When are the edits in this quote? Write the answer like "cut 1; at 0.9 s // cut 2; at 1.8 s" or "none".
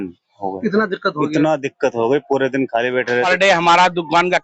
cut 1; at 3.1 s